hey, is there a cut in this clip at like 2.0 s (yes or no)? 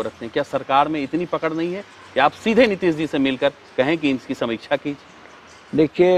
no